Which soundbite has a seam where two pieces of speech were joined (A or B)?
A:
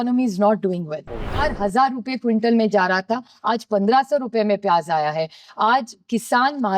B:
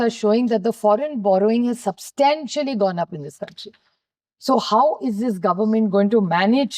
A